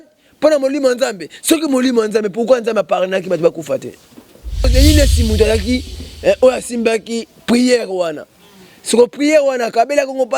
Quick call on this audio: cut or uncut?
cut